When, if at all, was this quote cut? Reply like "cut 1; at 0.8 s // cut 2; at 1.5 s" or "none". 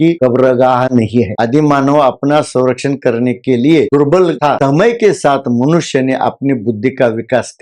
cut 1; at 1.3 s // cut 2; at 4.6 s

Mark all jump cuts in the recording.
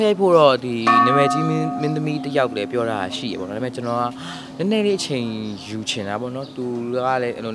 none

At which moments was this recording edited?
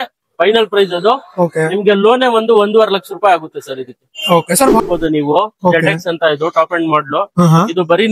cut 1; at 4.8 s

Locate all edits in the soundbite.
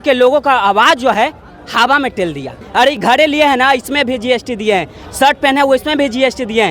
cut 1; at 2.6 s

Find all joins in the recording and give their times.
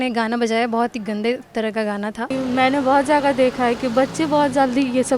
cut 1; at 2.3 s

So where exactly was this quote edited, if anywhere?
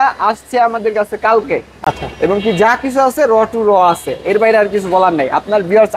none

